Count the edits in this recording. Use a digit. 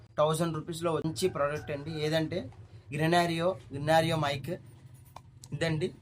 1